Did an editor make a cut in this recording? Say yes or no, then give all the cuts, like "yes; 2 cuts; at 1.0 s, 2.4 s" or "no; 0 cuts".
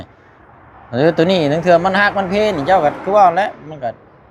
no; 0 cuts